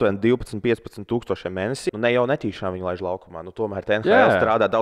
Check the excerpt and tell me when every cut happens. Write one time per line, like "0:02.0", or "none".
0:01.8